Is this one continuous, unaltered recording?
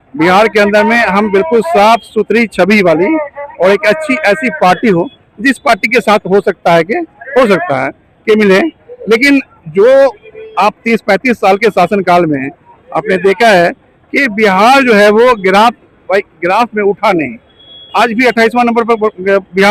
yes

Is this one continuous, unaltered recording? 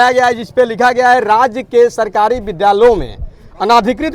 yes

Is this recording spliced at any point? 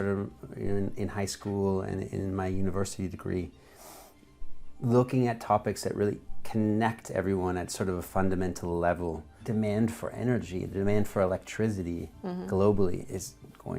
yes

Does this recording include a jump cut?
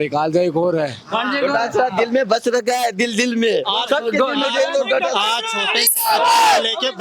no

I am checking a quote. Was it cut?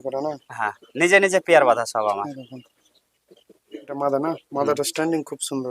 yes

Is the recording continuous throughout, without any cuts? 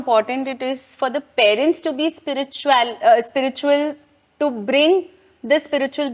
yes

